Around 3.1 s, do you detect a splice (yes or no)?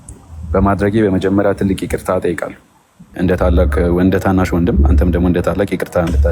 yes